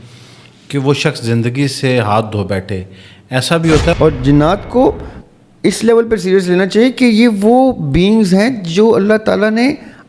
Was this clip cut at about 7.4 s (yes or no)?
no